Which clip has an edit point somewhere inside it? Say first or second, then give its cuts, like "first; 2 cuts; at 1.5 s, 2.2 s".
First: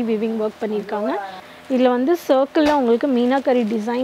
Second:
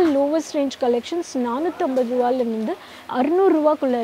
first; 1 cut; at 1.5 s